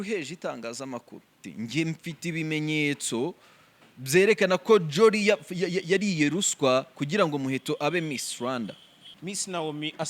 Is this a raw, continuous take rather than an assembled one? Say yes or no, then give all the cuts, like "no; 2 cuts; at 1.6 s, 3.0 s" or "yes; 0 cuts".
no; 2 cuts; at 1.4 s, 9.1 s